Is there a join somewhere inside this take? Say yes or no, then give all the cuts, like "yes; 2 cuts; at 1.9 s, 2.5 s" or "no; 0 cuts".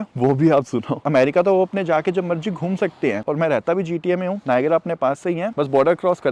no; 0 cuts